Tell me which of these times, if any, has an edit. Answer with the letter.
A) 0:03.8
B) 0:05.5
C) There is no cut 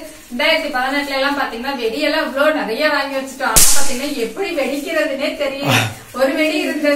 C